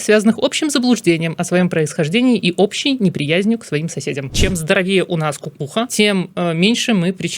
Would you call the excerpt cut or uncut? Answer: cut